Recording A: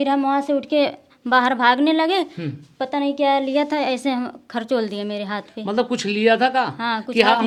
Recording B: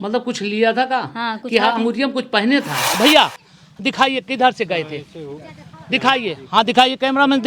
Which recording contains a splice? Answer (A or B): B